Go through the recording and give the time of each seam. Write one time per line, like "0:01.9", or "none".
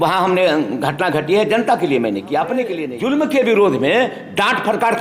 0:02.8